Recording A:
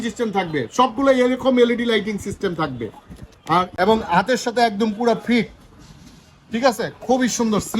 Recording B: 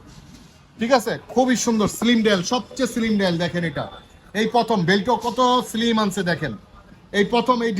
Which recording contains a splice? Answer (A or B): A